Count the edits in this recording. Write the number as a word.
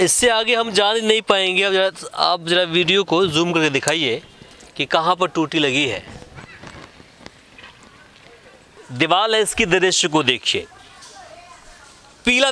one